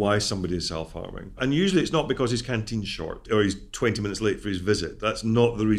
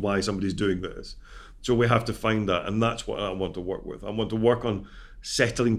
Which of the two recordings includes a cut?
first; 2 cuts; at 1.4 s, 3.3 s

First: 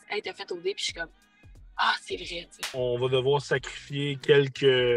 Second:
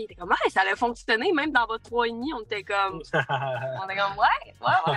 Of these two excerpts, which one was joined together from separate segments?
first; 1 cut; at 2.7 s

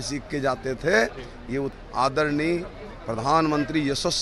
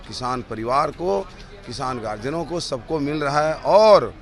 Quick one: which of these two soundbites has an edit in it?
first; 1 cut; at 1.7 s

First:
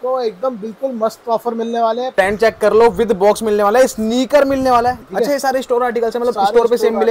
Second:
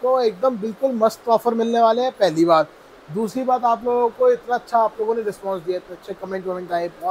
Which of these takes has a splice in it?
first; 2 cuts; at 2.2 s, 5.0 s

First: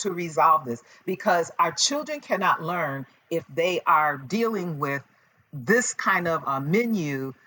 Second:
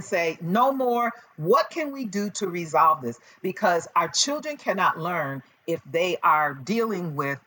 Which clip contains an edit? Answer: first; 1 cut; at 6.4 s

